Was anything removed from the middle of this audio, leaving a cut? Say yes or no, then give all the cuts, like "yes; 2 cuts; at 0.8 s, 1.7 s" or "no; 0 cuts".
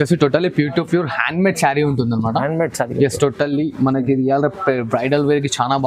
no; 0 cuts